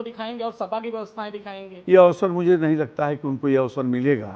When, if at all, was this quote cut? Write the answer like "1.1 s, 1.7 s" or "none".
none